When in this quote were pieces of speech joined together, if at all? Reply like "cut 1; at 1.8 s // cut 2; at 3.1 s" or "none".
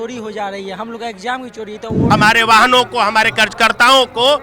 cut 1; at 2.0 s